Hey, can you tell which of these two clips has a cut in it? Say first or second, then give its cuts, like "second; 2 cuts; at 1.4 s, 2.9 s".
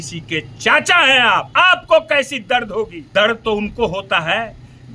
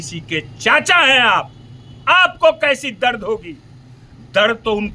first; 2 cuts; at 1.5 s, 3.0 s